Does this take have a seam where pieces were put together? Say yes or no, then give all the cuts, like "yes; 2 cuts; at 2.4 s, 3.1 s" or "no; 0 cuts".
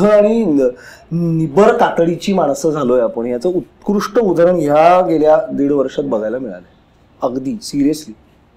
no; 0 cuts